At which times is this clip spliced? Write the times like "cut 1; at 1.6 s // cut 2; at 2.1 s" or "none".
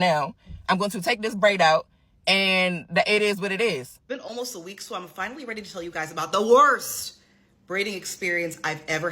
cut 1; at 3.9 s